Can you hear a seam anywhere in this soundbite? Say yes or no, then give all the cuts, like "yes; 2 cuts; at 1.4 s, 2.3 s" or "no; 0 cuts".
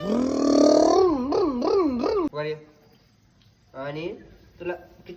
yes; 1 cut; at 2.3 s